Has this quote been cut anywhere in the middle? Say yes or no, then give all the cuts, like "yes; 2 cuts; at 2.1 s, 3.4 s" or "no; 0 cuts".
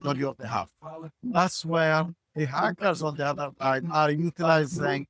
no; 0 cuts